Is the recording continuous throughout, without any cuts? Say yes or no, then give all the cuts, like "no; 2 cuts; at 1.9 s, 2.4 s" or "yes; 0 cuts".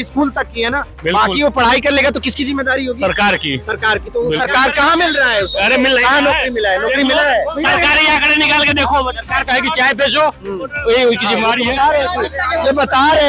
yes; 0 cuts